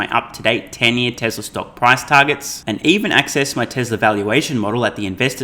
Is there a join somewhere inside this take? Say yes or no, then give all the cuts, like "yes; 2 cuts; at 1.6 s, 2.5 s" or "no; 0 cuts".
no; 0 cuts